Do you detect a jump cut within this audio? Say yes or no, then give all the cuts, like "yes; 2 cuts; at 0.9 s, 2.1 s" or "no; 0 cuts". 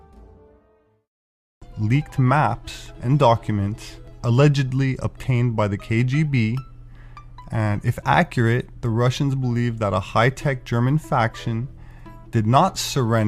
no; 0 cuts